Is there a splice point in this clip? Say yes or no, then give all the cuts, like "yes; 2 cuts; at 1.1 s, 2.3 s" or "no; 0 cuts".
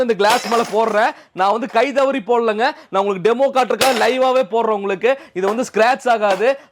no; 0 cuts